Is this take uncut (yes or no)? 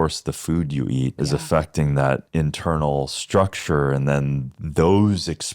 no